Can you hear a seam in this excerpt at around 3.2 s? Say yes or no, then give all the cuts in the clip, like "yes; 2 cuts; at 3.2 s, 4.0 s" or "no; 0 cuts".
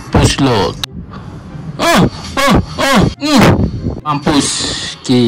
yes; 3 cuts; at 0.8 s, 3.2 s, 4.1 s